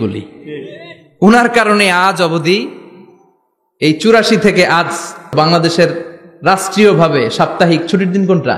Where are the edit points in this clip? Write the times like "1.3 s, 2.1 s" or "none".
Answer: 5.3 s